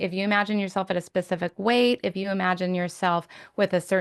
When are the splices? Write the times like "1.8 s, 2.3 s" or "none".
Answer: none